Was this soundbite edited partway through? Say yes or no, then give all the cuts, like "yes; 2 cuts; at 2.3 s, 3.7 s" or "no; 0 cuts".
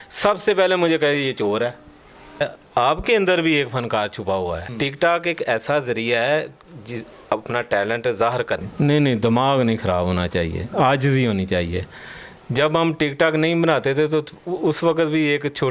yes; 3 cuts; at 2.4 s, 4.7 s, 8.7 s